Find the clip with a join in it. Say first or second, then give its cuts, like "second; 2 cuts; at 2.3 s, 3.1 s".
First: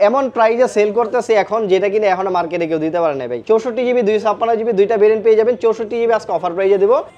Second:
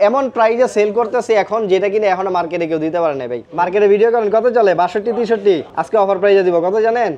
second; 2 cuts; at 3.3 s, 5.7 s